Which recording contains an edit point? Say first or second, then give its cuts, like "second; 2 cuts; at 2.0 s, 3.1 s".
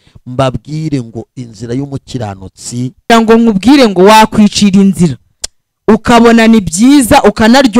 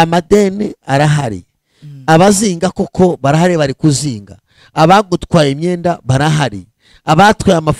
first; 1 cut; at 3.1 s